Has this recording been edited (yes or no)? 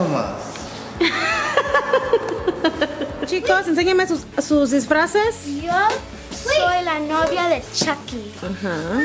yes